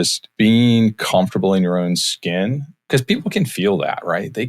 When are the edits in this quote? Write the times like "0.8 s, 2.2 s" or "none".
2.8 s